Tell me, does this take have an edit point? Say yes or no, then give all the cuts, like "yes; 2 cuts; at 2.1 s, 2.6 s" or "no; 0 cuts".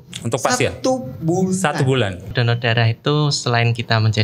yes; 1 cut; at 2.3 s